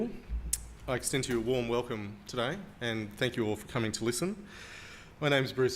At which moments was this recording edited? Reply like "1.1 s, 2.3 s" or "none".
3.4 s